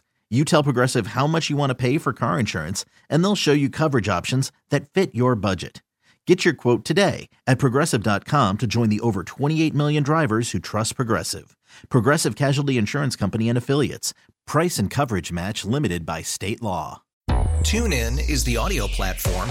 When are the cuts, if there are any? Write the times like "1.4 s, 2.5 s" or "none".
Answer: 17.0 s